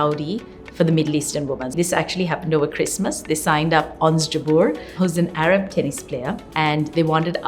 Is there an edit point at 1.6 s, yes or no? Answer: yes